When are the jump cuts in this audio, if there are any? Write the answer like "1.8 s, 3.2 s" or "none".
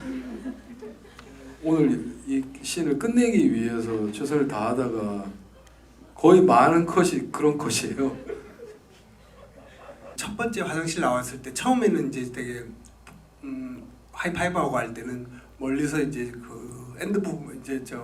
10.2 s